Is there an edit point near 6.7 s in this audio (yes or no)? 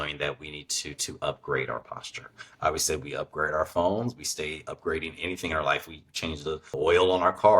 yes